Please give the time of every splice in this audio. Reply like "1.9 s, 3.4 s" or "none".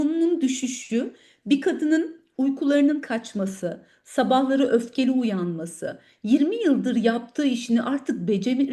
none

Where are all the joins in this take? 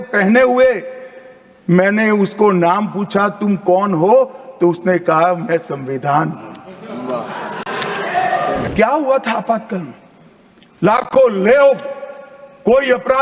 8.7 s

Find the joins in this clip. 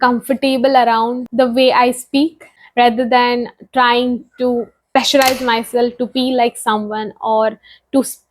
1.2 s, 4.8 s

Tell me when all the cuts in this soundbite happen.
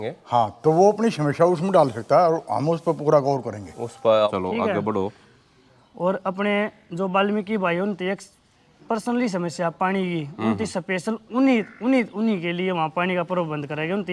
4.2 s

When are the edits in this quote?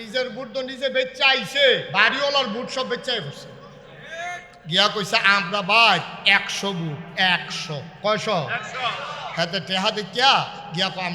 1.9 s, 4.5 s

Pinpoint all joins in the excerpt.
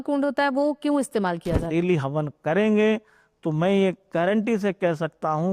1.7 s

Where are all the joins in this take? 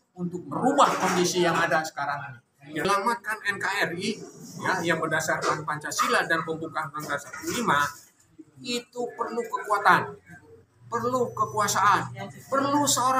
2.8 s

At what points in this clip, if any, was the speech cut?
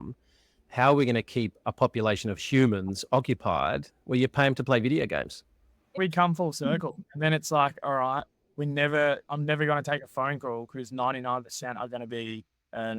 5.9 s

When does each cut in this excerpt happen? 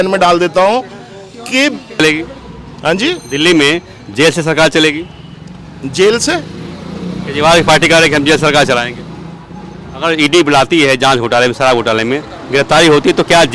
2.0 s

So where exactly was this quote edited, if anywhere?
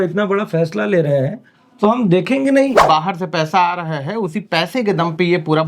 2.8 s

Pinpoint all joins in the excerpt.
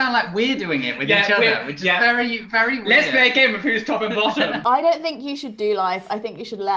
4.6 s

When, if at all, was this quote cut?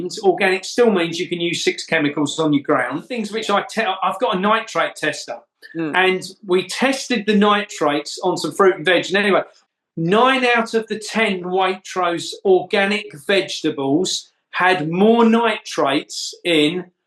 3.2 s, 9.6 s

